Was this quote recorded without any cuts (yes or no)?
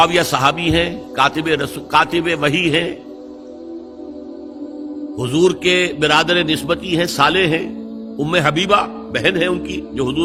yes